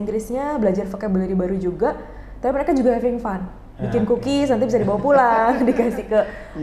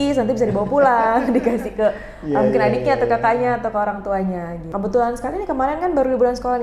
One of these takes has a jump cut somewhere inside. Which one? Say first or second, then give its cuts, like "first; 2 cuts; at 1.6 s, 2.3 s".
second; 1 cut; at 4.7 s